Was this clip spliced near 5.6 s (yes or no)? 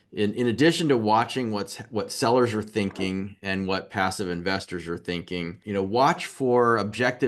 yes